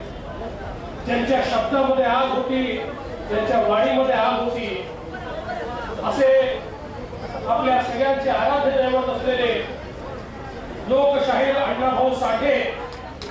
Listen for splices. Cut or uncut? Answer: uncut